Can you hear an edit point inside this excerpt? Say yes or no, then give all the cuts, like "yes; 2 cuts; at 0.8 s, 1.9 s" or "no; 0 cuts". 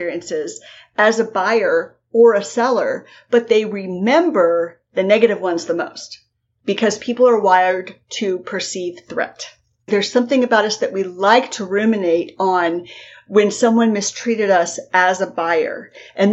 yes; 1 cut; at 9.9 s